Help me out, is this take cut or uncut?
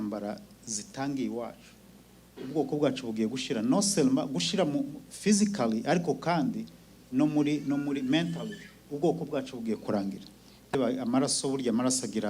cut